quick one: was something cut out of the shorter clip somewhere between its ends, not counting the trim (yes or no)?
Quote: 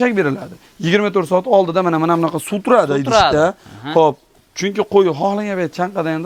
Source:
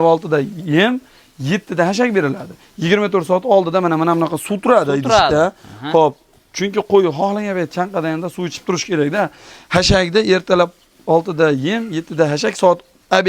no